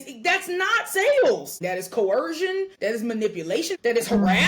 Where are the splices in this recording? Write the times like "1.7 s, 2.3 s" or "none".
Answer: 1.6 s, 2.7 s, 3.7 s

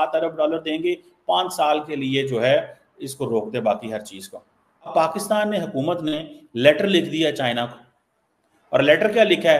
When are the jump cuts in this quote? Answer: 4.9 s

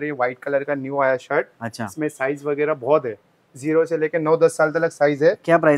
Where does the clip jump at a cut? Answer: none

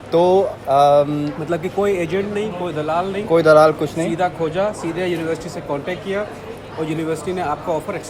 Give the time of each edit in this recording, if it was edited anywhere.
none

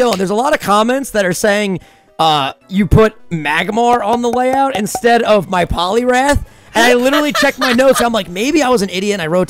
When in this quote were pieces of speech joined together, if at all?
none

